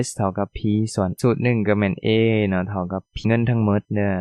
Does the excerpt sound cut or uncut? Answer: cut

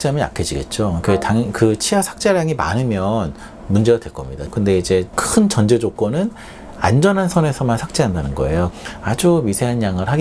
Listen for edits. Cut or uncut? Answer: cut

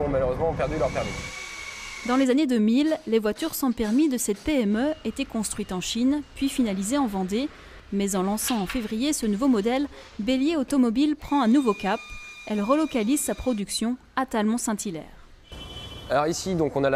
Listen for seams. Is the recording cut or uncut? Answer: uncut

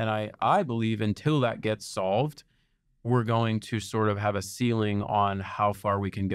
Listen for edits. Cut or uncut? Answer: uncut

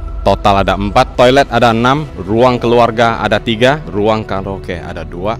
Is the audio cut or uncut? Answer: cut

